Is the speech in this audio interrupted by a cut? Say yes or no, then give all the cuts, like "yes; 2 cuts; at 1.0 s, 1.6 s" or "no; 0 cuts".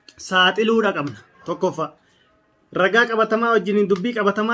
no; 0 cuts